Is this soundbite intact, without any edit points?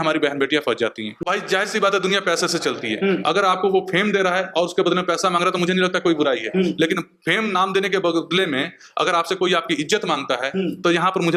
no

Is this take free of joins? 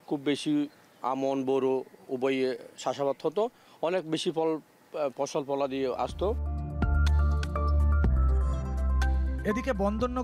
yes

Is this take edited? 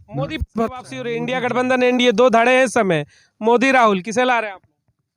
yes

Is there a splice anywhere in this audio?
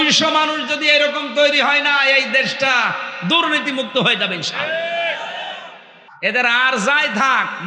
yes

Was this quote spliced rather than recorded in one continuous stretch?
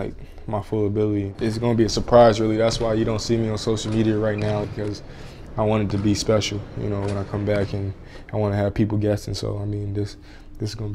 yes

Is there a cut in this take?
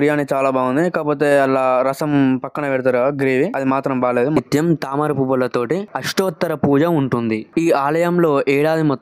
yes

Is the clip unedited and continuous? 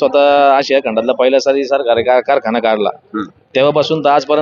yes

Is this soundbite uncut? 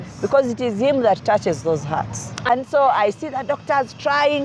no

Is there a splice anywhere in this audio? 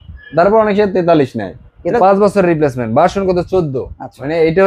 yes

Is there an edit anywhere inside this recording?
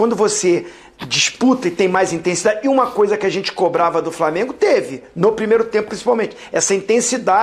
no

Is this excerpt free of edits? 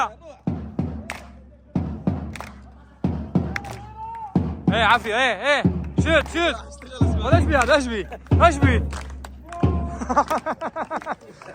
yes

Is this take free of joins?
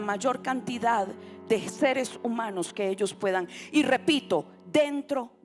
yes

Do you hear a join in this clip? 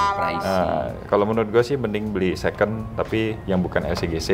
no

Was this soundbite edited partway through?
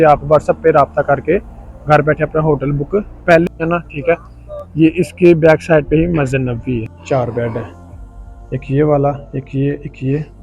yes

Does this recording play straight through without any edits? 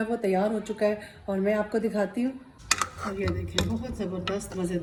yes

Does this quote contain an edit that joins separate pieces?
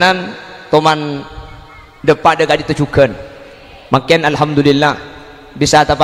no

